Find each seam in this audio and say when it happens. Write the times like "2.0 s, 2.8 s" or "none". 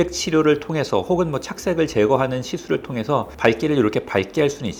none